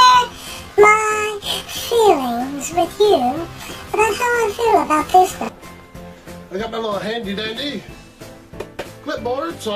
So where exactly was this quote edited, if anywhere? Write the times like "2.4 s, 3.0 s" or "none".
7.2 s